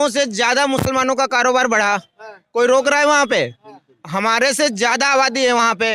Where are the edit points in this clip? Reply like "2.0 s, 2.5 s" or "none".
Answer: none